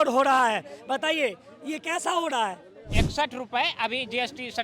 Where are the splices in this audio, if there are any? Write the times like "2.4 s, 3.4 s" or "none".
2.7 s